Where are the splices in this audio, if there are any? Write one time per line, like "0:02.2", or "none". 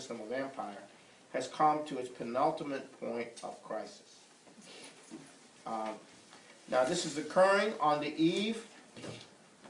0:05.0